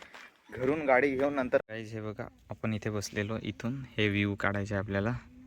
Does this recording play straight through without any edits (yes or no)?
no